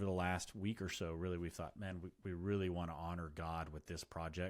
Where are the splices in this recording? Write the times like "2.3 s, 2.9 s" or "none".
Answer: none